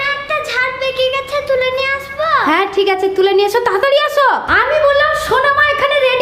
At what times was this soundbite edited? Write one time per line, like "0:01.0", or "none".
0:04.5